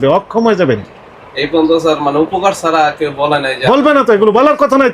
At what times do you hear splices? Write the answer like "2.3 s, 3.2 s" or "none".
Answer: none